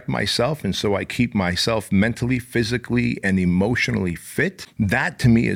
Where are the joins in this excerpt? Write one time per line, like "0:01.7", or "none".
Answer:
0:04.6